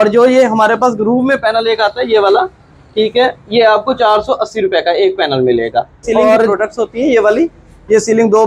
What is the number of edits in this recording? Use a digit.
1